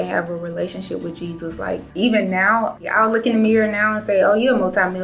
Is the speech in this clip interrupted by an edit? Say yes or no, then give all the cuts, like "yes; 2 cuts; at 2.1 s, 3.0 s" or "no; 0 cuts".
yes; 2 cuts; at 1.9 s, 2.9 s